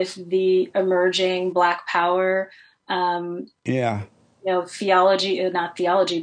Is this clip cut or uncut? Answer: uncut